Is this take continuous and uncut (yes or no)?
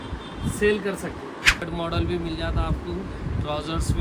no